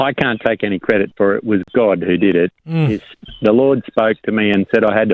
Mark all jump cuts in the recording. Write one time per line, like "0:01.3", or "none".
none